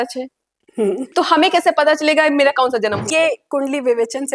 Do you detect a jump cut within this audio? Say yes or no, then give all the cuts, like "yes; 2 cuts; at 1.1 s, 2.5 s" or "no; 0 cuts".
yes; 2 cuts; at 1.1 s, 3.1 s